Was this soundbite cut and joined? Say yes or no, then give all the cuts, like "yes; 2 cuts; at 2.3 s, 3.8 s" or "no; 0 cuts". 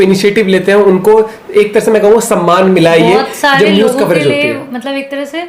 no; 0 cuts